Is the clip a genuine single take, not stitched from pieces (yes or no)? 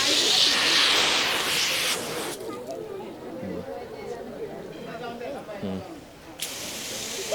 yes